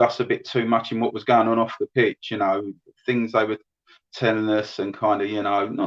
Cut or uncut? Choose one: uncut